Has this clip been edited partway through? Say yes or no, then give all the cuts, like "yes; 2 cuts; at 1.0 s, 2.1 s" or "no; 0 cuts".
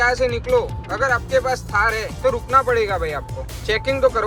no; 0 cuts